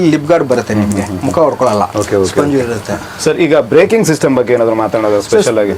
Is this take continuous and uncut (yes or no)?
yes